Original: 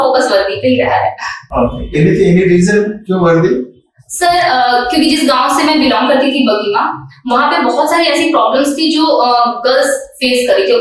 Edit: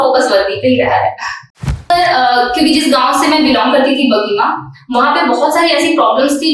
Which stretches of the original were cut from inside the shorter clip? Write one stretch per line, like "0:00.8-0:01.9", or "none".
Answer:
0:01.4-0:03.7